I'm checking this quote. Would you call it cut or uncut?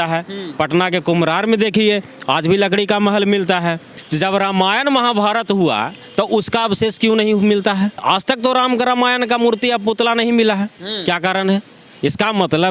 cut